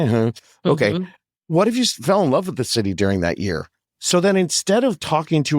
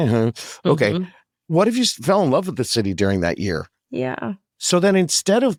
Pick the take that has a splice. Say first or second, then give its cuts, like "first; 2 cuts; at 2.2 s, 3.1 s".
first; 1 cut; at 3.8 s